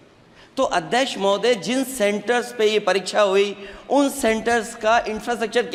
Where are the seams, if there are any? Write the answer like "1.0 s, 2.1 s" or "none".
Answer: none